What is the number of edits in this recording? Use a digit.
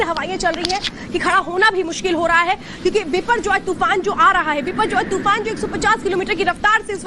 1